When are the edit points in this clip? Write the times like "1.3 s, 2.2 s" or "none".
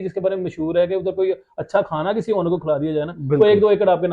none